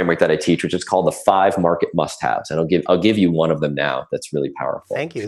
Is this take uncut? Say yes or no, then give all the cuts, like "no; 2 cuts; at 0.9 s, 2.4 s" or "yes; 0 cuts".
yes; 0 cuts